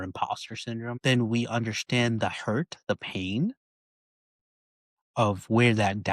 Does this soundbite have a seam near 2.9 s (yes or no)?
no